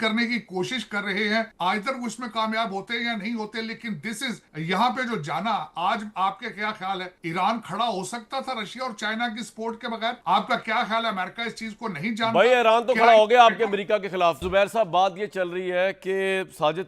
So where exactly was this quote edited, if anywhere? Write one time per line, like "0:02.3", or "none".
none

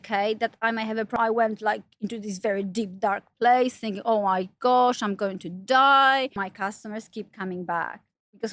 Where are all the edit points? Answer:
0:01.2
0:06.4

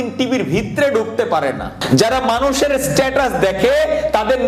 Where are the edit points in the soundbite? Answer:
0:01.8

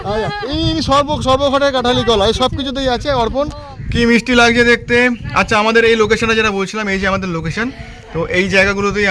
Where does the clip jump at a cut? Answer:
0:03.8

